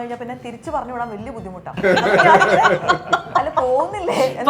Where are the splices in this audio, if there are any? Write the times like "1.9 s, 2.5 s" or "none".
1.8 s